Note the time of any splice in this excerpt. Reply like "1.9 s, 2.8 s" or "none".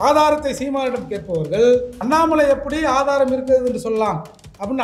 1.9 s

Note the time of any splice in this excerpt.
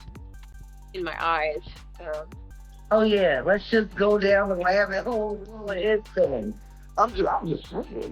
2.3 s

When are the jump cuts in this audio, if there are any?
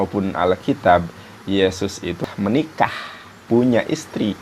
2.2 s, 3.4 s

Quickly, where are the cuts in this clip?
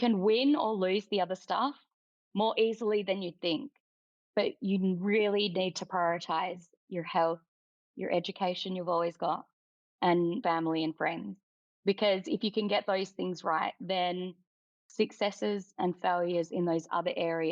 10.4 s

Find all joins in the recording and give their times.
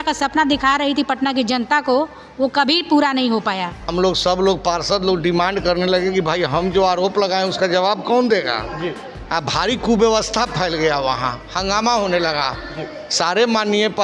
3.8 s

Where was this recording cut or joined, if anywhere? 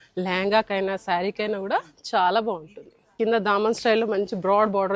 3.1 s

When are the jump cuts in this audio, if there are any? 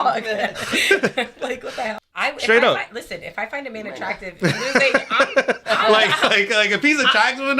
2.1 s

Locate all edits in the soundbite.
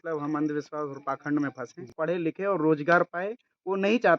2.0 s

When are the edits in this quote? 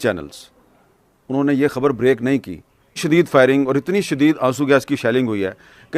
3.0 s

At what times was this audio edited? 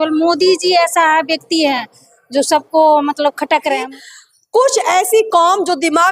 3.9 s

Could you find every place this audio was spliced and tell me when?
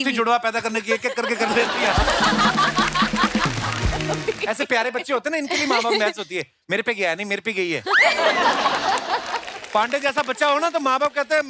4.1 s

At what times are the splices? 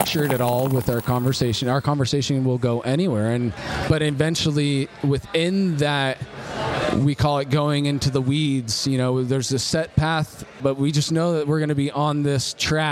3.6 s, 10.6 s

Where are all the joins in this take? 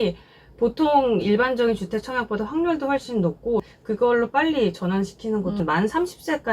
3.7 s, 5.6 s

